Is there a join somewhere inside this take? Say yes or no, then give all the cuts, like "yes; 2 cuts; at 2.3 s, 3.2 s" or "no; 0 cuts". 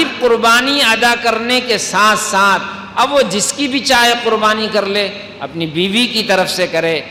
no; 0 cuts